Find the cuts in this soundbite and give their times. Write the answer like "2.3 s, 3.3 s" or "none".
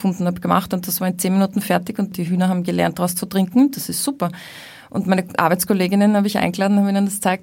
2.1 s

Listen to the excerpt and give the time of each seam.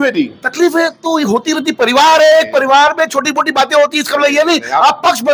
none

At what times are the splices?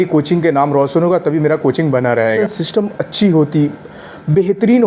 2.4 s

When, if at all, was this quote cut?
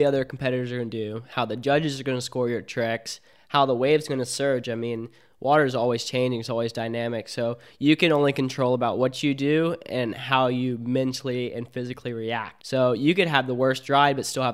12.6 s

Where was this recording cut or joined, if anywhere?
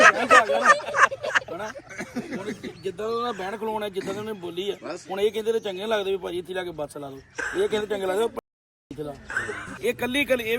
9.6 s

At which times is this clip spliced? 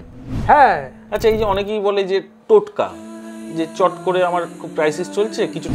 1.0 s

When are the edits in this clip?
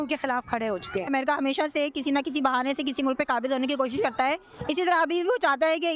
1.1 s

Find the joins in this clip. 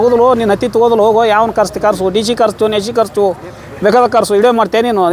none

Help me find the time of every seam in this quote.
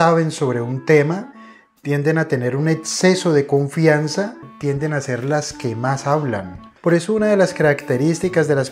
4.5 s, 6.6 s

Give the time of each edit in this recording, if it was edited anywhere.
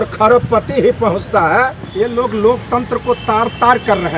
1.8 s

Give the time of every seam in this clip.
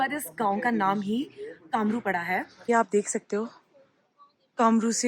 2.5 s

